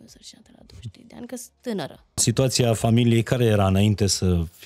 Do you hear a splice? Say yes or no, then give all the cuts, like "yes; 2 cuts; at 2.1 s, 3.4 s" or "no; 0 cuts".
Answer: yes; 1 cut; at 2.2 s